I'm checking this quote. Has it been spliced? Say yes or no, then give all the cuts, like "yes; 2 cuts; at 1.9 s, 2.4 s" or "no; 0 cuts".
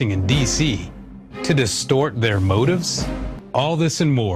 yes; 1 cut; at 2.8 s